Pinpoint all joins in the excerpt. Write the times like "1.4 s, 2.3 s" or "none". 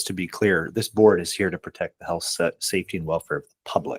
none